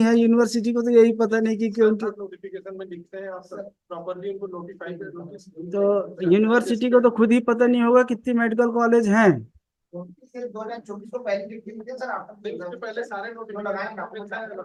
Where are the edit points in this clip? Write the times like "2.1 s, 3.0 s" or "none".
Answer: none